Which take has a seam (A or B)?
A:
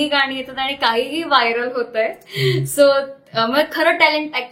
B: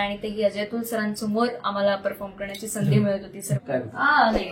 B